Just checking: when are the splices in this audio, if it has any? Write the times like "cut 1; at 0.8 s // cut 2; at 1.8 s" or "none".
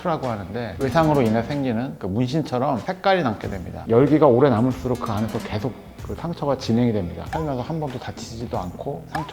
cut 1; at 3.7 s // cut 2; at 7.2 s